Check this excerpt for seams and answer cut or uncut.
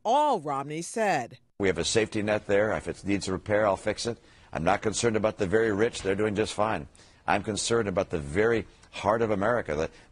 uncut